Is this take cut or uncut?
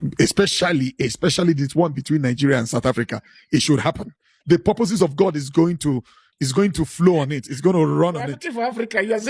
uncut